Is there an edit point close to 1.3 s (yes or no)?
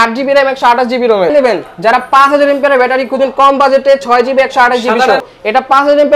yes